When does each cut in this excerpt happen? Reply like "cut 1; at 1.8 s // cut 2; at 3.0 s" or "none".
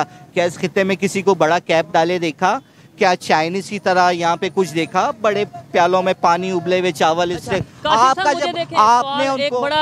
none

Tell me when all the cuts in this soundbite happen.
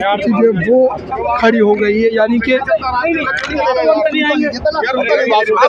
none

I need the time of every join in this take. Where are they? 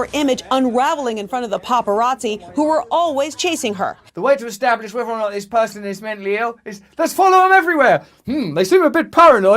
cut 1; at 4.0 s

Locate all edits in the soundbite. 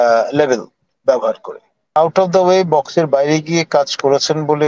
cut 1; at 2.0 s

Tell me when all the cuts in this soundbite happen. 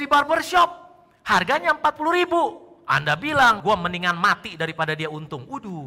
cut 1; at 3.6 s

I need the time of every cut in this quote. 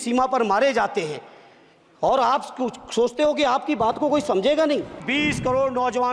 cut 1; at 5.1 s

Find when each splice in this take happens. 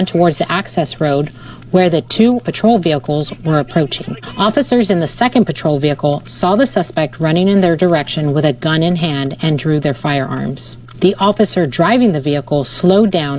none

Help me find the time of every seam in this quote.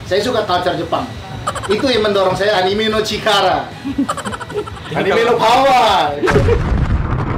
none

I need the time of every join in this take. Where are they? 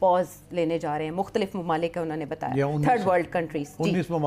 none

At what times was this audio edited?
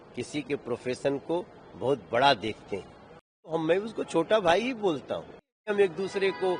cut 1; at 3.6 s // cut 2; at 5.6 s

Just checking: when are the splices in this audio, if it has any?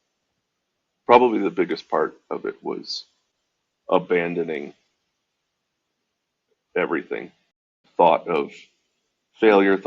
cut 1; at 6.5 s

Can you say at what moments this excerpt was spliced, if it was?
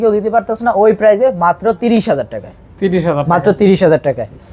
none

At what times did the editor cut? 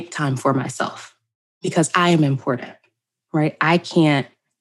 cut 1; at 1.4 s

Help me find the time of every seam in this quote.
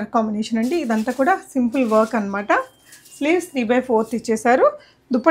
none

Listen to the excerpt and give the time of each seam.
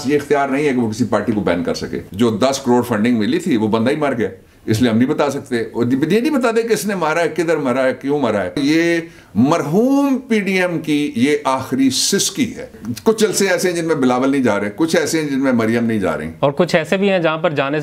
cut 1; at 2.0 s // cut 2; at 8.6 s // cut 3; at 12.8 s // cut 4; at 16.3 s

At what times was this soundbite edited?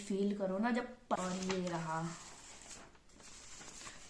cut 1; at 1.2 s

